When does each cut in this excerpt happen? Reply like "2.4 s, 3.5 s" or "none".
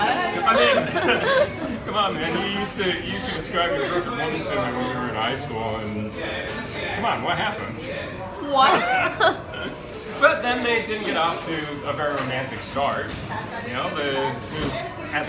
none